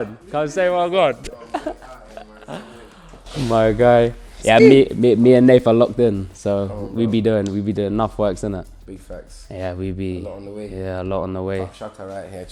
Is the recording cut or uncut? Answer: uncut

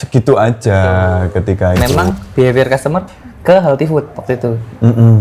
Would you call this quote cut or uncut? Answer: cut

